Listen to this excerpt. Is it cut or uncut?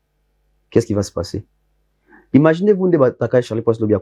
uncut